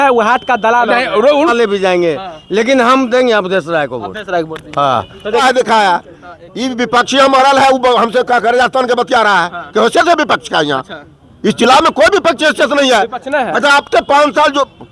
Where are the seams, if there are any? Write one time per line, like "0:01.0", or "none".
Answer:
0:01.5
0:05.4